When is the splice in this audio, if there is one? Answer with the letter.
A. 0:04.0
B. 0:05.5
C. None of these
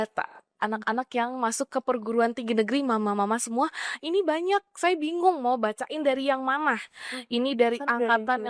C